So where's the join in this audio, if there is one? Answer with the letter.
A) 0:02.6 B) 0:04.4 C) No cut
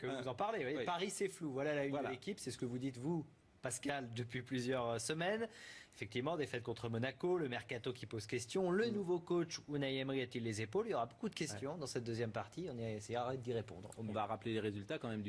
A